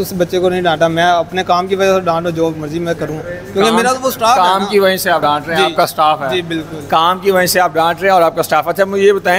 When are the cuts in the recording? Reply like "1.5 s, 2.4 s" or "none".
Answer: none